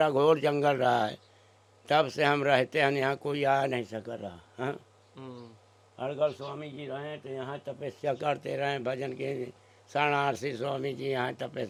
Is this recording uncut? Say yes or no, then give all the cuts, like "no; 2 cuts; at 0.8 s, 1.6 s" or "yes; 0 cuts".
yes; 0 cuts